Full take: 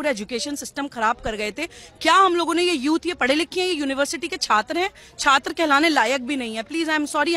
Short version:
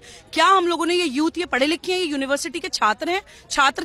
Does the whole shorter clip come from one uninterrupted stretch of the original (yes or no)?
yes